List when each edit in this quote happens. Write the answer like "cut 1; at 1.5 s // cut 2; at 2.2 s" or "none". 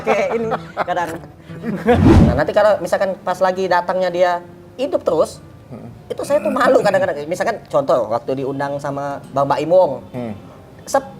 cut 1; at 2.0 s